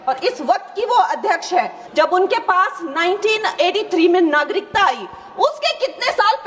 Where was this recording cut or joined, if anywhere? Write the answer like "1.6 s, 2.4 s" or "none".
1.8 s